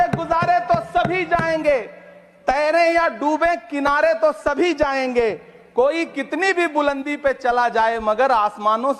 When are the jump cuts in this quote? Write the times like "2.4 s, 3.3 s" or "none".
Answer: none